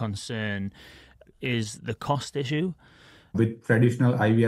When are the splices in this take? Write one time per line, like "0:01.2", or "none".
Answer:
0:01.3
0:03.4